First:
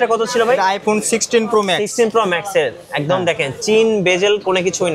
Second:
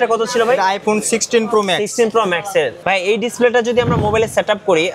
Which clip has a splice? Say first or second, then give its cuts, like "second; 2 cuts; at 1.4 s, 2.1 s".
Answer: second; 1 cut; at 2.8 s